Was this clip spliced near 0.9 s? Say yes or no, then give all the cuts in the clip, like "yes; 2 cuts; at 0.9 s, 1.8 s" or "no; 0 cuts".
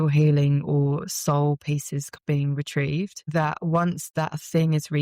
no; 2 cuts; at 2.1 s, 3.3 s